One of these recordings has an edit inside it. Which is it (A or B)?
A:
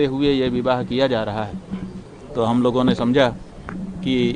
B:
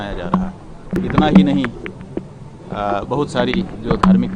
B